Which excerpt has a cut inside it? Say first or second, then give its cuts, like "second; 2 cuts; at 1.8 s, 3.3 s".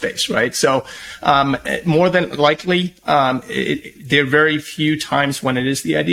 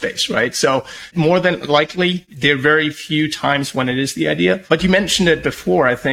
second; 3 cuts; at 1.0 s, 2.3 s, 4.7 s